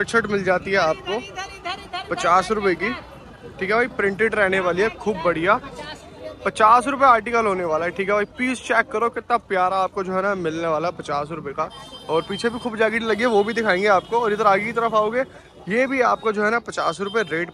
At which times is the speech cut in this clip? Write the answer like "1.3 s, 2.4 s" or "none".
none